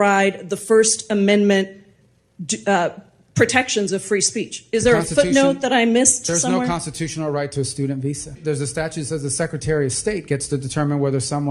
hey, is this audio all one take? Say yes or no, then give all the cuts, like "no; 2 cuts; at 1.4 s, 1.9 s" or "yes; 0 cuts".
no; 1 cut; at 8.4 s